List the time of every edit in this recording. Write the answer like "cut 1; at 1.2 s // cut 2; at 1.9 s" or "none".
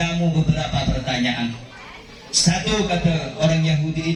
none